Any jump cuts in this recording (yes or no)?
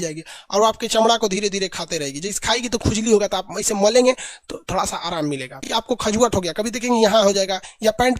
yes